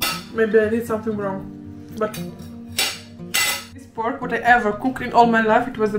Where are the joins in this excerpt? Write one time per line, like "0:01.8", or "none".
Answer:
0:03.9